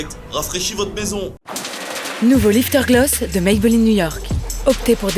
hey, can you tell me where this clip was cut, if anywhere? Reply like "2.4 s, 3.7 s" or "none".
1.4 s